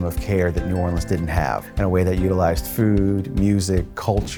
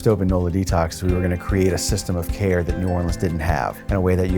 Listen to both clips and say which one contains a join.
second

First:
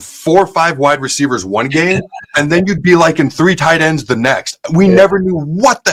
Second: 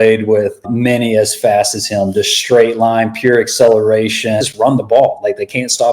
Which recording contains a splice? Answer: second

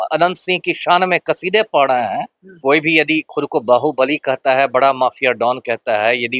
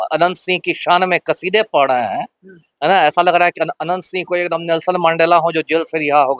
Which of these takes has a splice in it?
first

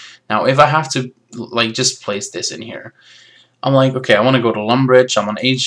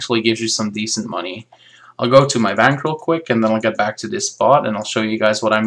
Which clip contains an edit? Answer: first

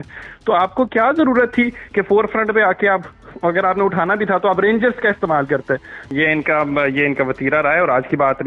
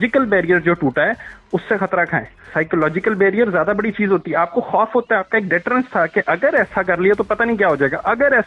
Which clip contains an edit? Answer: first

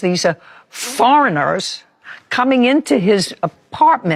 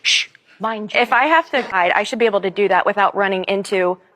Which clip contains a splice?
second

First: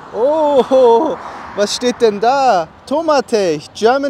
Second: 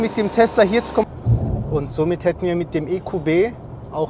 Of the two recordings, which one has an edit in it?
second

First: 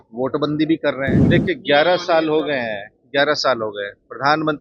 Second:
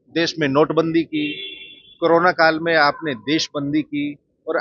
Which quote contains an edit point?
first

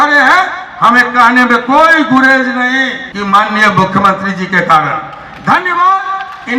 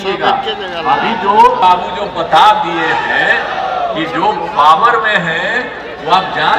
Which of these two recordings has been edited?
first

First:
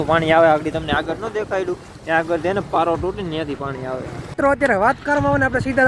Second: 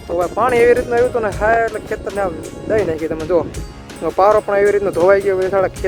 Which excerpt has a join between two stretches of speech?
first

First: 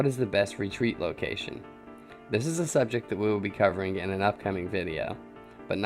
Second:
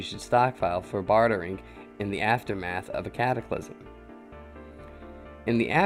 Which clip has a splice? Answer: first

